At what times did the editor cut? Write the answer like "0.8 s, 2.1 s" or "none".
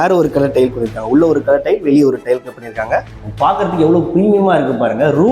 3.2 s